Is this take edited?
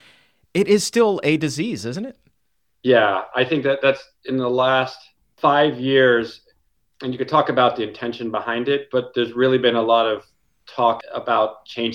yes; 3 cuts; at 5.3 s, 6.6 s, 11.0 s

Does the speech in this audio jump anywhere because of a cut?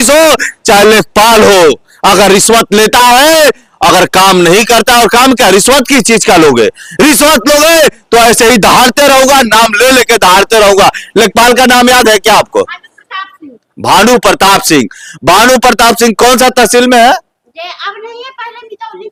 no; 0 cuts

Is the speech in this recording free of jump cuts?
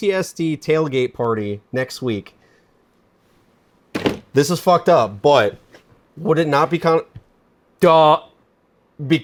yes; 0 cuts

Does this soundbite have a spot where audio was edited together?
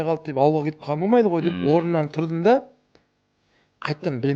no; 0 cuts

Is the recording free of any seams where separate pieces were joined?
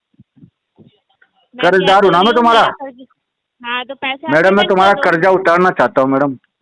yes; 0 cuts

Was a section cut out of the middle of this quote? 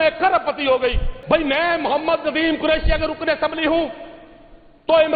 yes; 1 cut; at 1.1 s

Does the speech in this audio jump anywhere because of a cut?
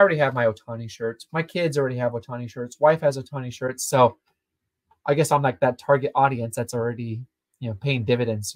no; 0 cuts

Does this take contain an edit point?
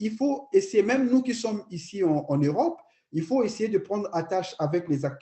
no; 0 cuts

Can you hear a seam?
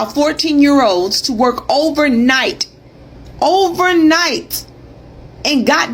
no; 0 cuts

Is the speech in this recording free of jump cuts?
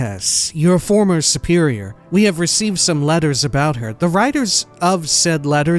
no; 1 cut; at 1.9 s

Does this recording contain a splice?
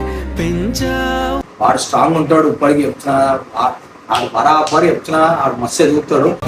yes; 1 cut; at 1.4 s

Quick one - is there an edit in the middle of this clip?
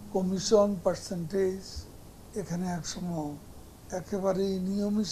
no; 0 cuts

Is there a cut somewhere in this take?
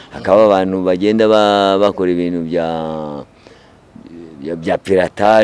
no; 0 cuts

